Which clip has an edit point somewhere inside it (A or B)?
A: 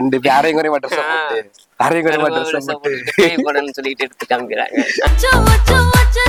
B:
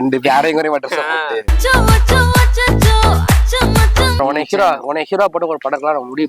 B